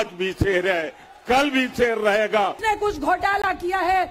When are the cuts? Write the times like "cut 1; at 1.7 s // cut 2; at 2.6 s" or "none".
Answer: cut 1; at 2.6 s